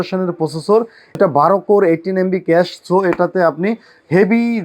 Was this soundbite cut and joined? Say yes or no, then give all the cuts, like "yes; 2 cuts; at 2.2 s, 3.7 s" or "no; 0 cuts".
yes; 1 cut; at 1.2 s